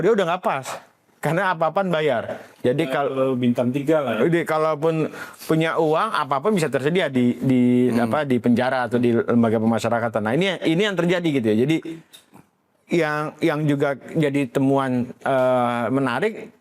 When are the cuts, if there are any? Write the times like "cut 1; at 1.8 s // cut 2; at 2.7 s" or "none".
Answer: none